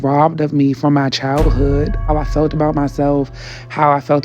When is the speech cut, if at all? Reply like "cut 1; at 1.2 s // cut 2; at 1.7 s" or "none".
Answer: cut 1; at 2.1 s